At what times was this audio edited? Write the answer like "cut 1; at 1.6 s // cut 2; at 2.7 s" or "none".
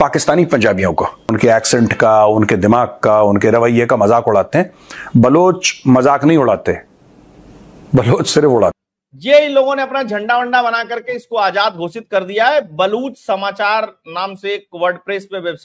cut 1; at 1.3 s // cut 2; at 8.8 s